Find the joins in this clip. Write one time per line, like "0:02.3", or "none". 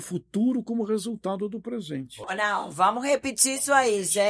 0:02.3